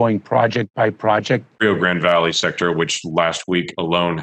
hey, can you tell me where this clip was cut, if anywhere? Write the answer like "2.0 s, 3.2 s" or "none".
1.6 s